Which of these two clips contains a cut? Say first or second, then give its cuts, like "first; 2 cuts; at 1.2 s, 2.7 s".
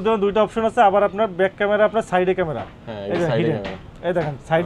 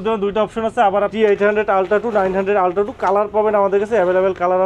second; 1 cut; at 1.1 s